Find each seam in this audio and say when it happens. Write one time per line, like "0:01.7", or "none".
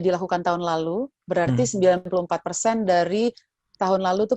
0:02.0